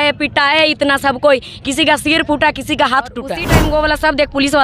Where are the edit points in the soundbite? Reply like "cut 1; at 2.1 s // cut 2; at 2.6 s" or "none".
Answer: cut 1; at 3.5 s